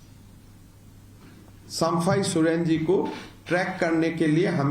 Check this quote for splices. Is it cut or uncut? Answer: uncut